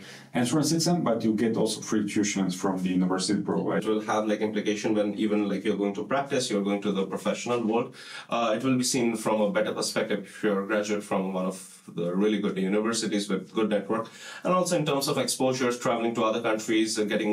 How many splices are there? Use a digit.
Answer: 1